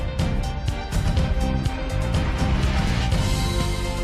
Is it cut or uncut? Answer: uncut